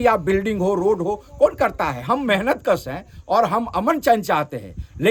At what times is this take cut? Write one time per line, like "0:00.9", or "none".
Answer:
none